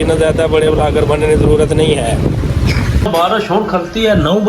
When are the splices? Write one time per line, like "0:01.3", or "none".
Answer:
0:02.9